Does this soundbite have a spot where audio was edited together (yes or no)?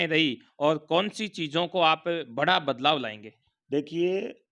no